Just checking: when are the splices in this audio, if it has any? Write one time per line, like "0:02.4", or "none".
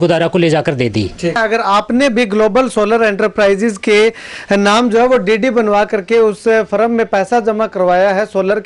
0:01.4